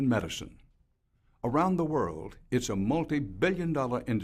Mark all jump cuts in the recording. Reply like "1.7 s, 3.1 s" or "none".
none